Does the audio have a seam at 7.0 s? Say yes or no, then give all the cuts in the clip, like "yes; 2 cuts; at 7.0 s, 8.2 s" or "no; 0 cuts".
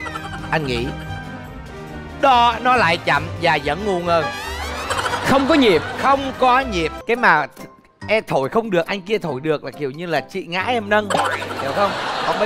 yes; 1 cut; at 7.0 s